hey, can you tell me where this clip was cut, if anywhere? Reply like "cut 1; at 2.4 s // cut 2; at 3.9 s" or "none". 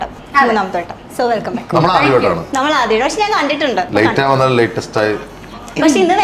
cut 1; at 3.9 s